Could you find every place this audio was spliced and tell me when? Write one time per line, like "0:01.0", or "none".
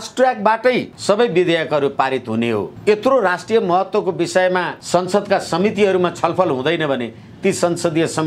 0:00.9
0:02.7
0:04.8